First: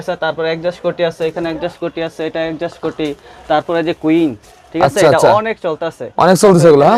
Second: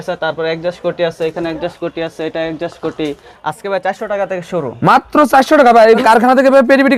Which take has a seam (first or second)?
second